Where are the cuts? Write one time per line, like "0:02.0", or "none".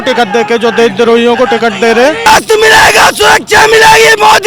0:02.2